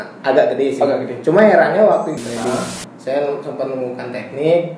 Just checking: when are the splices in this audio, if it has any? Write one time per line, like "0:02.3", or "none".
0:02.1